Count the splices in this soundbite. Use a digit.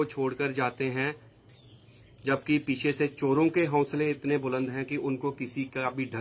0